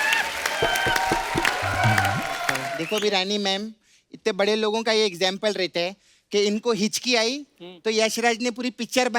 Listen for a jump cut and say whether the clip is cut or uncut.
cut